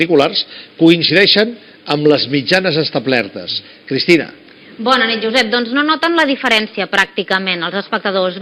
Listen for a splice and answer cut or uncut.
cut